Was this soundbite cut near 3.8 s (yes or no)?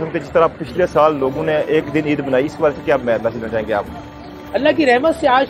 no